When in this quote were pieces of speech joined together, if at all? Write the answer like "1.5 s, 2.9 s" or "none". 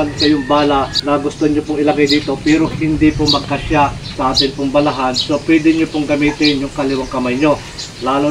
0.9 s, 4.1 s